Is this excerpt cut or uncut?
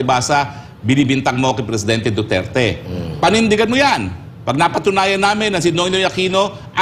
uncut